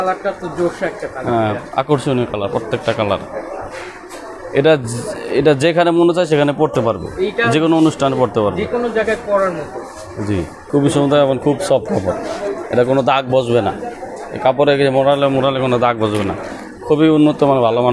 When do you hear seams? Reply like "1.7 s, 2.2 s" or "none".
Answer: 10.6 s